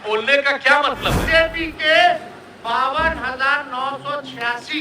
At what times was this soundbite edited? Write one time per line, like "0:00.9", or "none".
0:01.2